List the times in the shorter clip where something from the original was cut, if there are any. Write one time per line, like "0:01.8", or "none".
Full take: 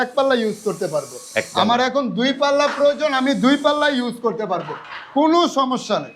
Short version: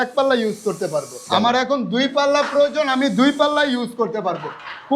0:01.2